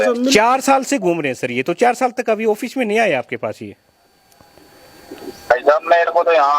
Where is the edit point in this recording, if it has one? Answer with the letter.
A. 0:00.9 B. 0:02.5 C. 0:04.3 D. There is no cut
D